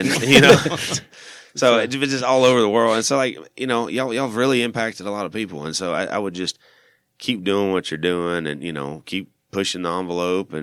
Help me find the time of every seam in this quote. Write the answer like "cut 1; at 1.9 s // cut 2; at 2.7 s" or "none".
none